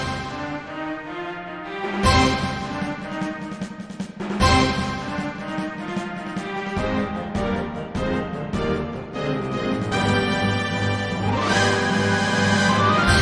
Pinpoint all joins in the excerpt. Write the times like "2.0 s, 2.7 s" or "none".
1.0 s